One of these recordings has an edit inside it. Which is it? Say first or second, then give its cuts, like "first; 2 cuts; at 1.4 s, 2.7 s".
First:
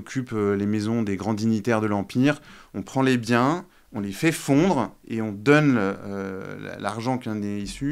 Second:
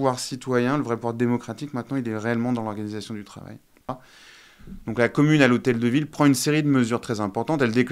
second; 1 cut; at 3.9 s